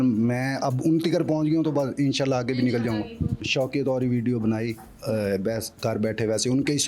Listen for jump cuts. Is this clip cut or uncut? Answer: cut